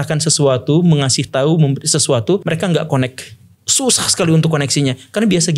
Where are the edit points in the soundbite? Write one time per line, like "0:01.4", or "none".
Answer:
0:02.4